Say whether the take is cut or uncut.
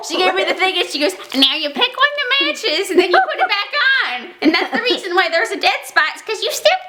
uncut